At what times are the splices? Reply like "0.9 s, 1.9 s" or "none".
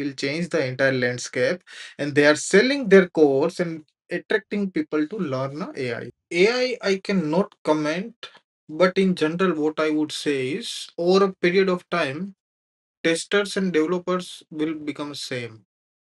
6.1 s